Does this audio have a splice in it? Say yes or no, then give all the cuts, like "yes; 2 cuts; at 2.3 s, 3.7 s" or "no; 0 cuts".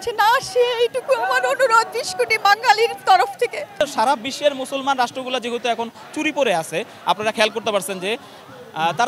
yes; 1 cut; at 3.8 s